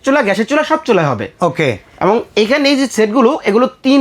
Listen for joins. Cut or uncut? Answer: uncut